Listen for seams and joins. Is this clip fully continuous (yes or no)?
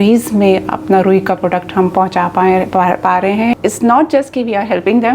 no